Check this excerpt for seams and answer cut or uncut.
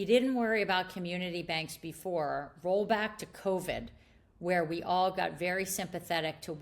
uncut